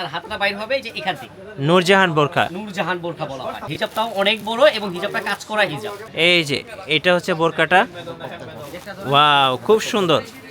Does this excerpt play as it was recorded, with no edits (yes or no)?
no